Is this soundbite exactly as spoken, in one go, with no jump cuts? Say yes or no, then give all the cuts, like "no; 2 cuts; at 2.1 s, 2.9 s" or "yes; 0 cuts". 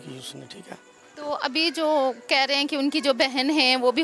no; 1 cut; at 1.0 s